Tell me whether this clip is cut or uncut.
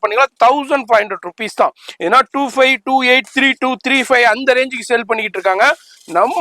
uncut